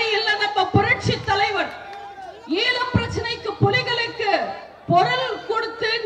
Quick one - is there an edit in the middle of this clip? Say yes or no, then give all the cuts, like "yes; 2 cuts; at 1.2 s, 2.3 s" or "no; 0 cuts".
no; 0 cuts